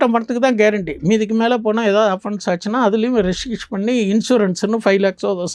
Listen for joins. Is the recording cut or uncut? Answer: uncut